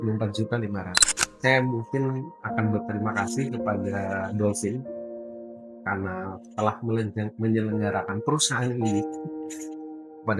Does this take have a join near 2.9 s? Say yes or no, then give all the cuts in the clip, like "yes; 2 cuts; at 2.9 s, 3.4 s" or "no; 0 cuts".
no; 1 cut; at 1.2 s